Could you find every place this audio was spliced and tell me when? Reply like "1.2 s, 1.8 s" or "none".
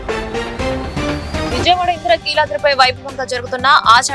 1.5 s